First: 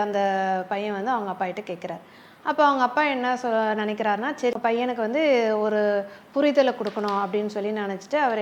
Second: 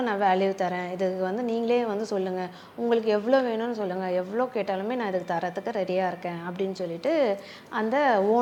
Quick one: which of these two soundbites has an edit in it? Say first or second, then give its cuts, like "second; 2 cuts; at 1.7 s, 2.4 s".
first; 1 cut; at 4.5 s